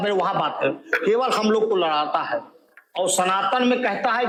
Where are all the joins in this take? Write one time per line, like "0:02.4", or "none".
none